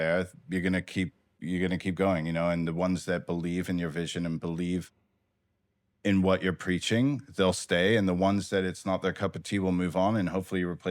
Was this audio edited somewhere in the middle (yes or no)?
no